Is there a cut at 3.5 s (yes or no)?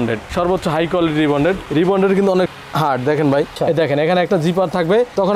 yes